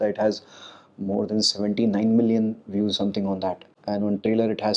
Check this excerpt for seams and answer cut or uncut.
cut